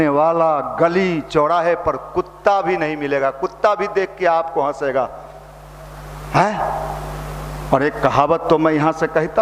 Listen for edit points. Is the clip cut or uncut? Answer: uncut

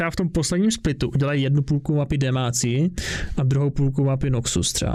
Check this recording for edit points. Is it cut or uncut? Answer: uncut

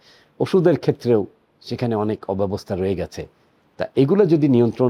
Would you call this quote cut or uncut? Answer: uncut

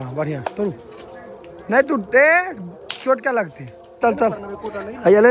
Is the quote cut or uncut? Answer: cut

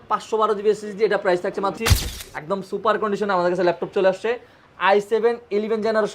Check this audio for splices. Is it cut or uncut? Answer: cut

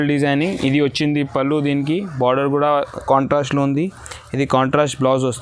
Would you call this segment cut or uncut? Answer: uncut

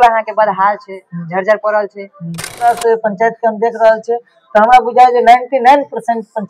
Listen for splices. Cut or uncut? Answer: cut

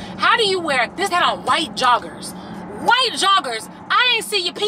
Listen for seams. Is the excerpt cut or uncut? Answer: cut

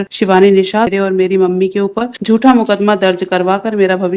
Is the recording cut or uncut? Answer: cut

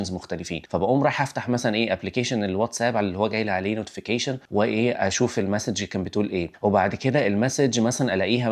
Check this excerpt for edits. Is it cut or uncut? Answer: uncut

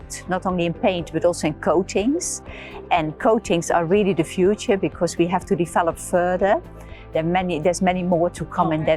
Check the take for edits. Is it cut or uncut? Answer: uncut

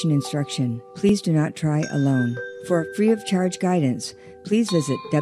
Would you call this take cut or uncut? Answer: cut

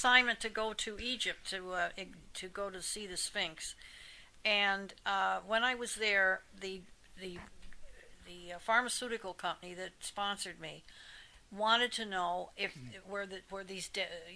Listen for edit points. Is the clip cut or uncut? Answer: uncut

